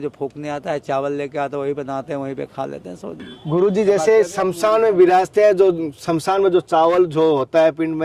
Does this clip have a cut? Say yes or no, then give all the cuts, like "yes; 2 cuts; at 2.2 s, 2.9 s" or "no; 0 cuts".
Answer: no; 0 cuts